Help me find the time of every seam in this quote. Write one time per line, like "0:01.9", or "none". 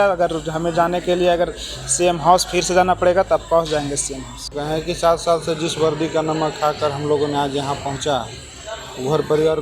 0:04.6